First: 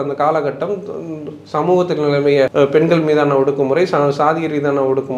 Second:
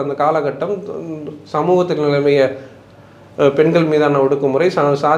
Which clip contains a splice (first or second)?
first